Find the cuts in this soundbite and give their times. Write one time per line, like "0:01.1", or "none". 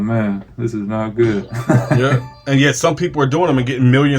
0:02.0